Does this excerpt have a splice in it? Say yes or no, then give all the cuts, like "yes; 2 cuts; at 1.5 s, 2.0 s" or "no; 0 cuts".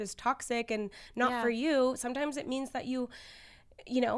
no; 0 cuts